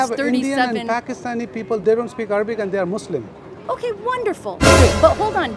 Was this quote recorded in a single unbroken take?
no; 1 cut; at 1.8 s

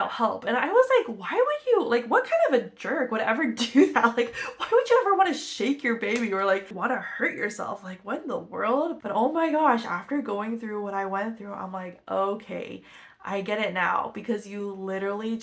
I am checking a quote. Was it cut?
no; 0 cuts

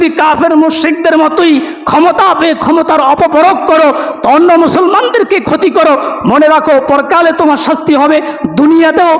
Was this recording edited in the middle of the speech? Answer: no; 0 cuts

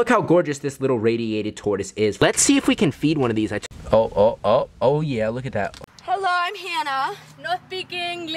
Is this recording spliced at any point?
yes; 3 cuts; at 2.3 s, 3.6 s, 5.8 s

